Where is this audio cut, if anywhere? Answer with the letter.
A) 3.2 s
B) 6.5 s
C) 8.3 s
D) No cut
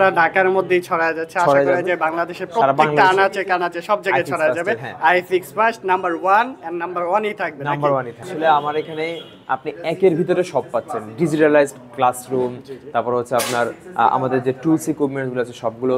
C